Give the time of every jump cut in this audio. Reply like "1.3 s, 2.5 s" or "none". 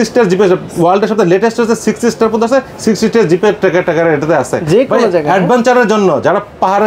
none

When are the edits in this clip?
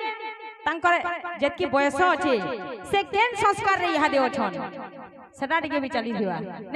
none

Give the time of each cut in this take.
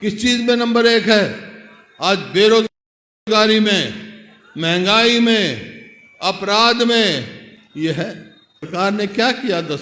8.7 s

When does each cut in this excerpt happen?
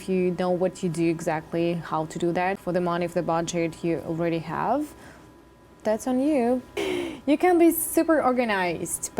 2.6 s, 6.8 s

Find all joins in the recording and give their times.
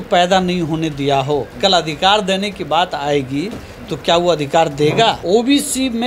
1.5 s, 5.2 s

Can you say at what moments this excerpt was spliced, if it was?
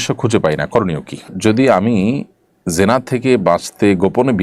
1.3 s

